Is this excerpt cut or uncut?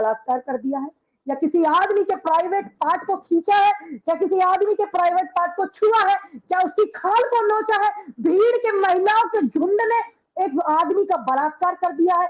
uncut